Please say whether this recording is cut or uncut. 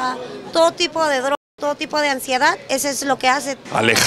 uncut